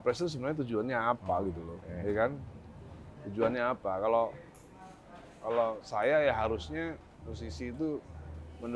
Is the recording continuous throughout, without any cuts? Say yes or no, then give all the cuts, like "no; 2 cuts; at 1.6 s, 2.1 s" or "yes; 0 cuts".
yes; 0 cuts